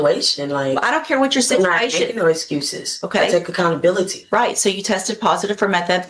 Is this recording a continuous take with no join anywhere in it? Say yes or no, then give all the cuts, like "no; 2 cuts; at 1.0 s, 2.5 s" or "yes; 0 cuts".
yes; 0 cuts